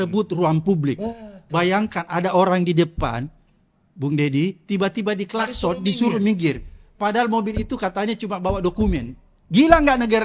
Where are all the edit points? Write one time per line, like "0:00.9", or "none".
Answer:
none